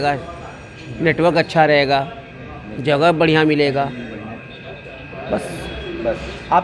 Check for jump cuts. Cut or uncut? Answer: uncut